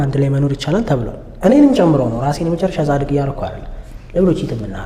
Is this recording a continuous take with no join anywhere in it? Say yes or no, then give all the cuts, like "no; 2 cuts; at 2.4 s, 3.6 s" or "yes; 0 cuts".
yes; 0 cuts